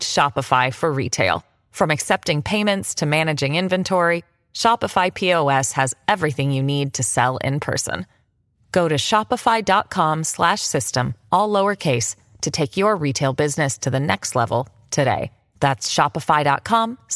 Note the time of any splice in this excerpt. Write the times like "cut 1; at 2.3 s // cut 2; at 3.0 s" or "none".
none

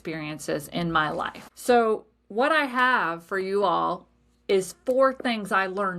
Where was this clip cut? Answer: cut 1; at 1.4 s

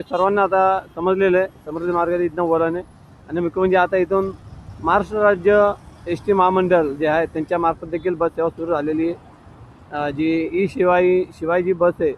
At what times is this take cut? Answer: none

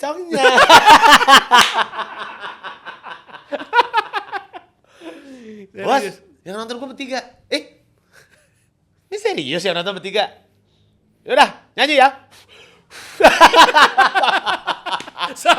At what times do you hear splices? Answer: none

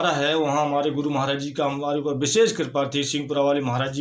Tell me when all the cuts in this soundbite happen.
none

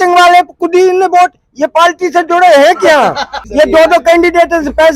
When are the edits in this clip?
cut 1; at 3.4 s

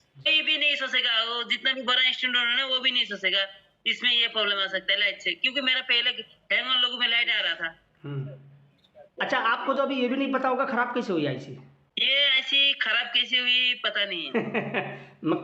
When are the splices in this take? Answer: none

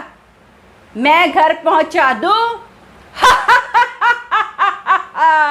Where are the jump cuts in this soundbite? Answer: none

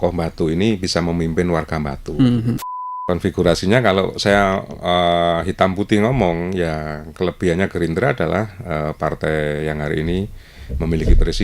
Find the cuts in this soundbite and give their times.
cut 1; at 2.6 s

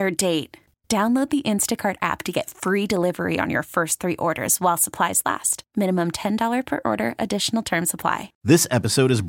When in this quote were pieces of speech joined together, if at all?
cut 1; at 8.3 s

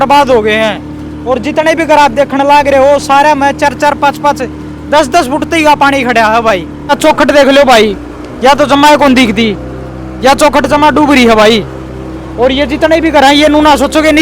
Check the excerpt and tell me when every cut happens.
cut 1; at 6.9 s

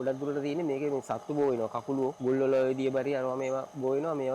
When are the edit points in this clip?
cut 1; at 2.2 s

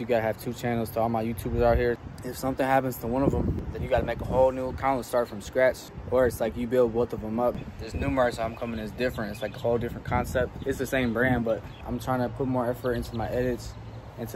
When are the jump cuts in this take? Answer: cut 1; at 2.1 s // cut 2; at 3.6 s // cut 3; at 5.9 s // cut 4; at 7.7 s // cut 5; at 11.8 s

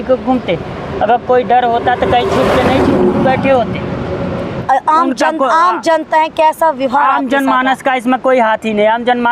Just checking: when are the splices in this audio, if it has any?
cut 1; at 4.5 s

